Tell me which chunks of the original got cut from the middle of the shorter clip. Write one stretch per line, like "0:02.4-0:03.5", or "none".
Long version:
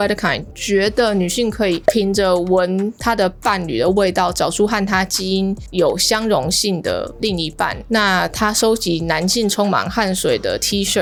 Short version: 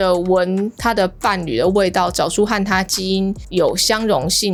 none

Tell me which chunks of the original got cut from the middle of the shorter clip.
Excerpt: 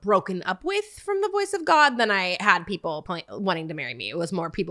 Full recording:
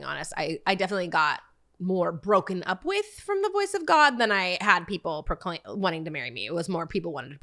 0:05.2-0:05.4

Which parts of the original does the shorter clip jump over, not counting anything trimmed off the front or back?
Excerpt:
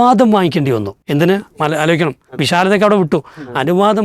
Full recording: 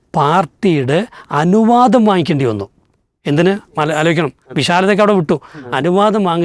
0:02.7-0:03.1

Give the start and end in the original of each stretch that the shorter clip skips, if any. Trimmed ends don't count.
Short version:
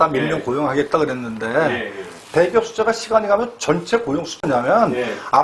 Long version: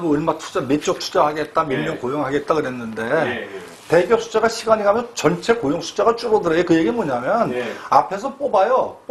0:05.9-0:07.0

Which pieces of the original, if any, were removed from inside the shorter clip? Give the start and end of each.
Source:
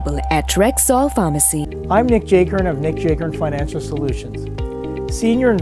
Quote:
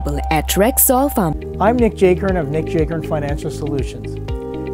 0:01.4-0:01.7

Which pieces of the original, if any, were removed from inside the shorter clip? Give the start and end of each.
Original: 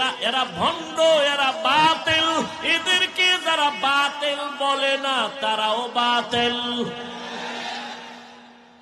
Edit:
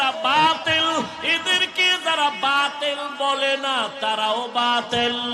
none

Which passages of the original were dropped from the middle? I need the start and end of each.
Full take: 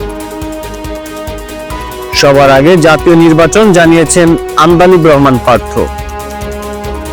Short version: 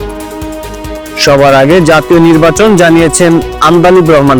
0:01.2-0:02.2

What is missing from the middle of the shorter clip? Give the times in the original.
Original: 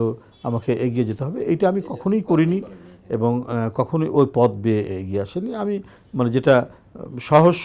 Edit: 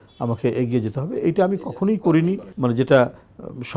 0:02.7-0:06.0

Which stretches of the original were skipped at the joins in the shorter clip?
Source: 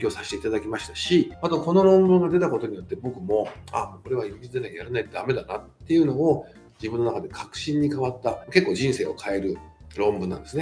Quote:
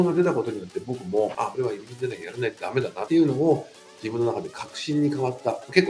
0:03.6-0:04.0
0:05.5-0:05.8

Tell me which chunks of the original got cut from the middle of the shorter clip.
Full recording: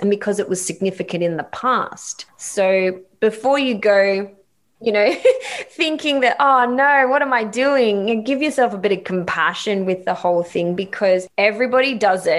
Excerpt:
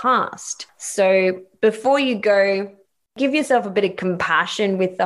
0:04.7-0:08.2

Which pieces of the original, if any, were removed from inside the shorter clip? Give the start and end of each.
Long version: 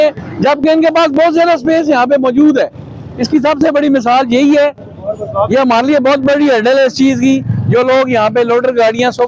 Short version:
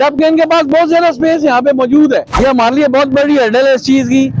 0:02.8-0:05.5

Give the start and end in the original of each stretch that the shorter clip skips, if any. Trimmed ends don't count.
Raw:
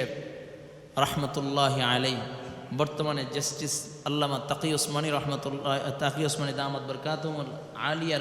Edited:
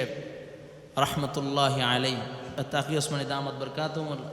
0:02.6-0:05.9

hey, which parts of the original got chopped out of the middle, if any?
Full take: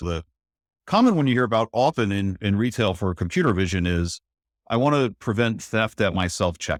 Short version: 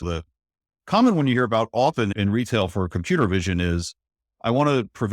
0:02.1-0:02.4

